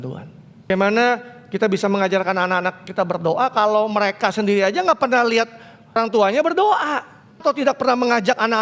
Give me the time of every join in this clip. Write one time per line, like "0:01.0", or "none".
0:00.7
0:06.0
0:07.4

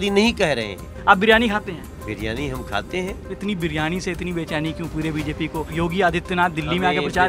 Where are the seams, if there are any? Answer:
0:00.9
0:01.9
0:03.3
0:05.7

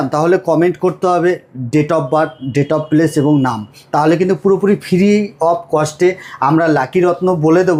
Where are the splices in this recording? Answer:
none

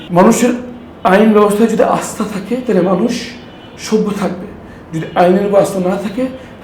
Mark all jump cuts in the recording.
none

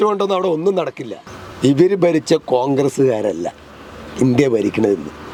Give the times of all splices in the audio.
none

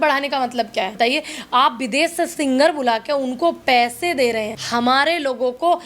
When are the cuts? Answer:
0:00.9
0:04.6

